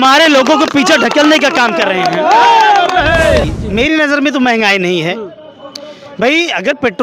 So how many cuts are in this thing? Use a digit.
1